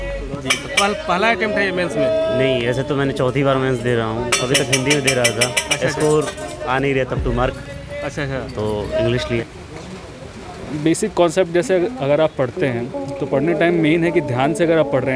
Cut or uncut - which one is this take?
cut